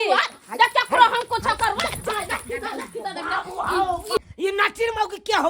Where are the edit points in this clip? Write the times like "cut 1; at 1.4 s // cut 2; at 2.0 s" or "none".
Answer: cut 1; at 4.2 s